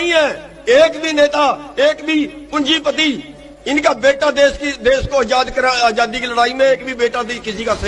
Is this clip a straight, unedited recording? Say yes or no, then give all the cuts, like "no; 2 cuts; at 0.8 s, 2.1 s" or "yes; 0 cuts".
yes; 0 cuts